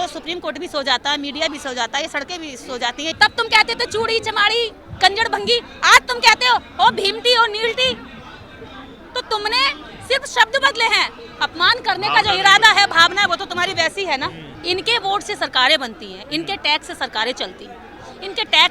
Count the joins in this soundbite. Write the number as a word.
two